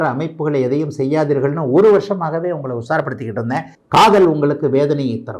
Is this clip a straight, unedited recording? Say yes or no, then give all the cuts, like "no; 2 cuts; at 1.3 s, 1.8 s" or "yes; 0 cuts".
no; 1 cut; at 3.8 s